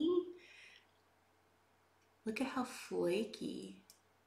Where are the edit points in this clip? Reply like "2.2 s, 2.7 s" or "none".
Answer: 1.2 s